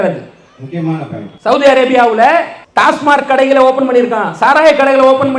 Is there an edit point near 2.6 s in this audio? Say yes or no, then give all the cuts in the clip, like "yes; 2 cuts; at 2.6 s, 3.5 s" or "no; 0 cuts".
yes; 2 cuts; at 1.2 s, 2.6 s